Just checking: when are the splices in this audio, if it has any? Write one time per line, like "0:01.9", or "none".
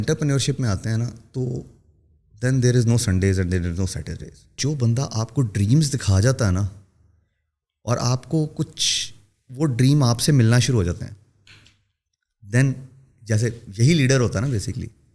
0:04.6